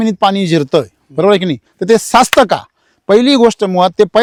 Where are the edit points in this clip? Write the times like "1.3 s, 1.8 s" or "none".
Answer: none